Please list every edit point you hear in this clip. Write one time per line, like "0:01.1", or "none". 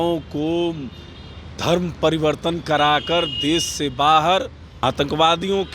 0:04.6